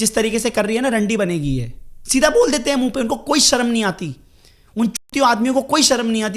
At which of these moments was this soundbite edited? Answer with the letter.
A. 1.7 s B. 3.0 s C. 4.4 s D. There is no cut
D